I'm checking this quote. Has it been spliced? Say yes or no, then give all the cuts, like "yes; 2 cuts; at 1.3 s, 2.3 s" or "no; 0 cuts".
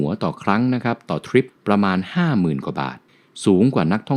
yes; 2 cuts; at 1.5 s, 3.0 s